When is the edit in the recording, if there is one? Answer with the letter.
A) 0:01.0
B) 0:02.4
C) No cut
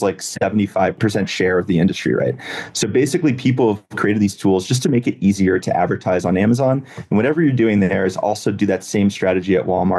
A